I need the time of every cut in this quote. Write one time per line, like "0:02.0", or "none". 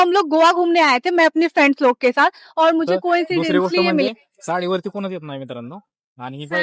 0:04.1